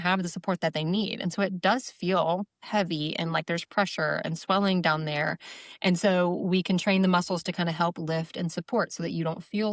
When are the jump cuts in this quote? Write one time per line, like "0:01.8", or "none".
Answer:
none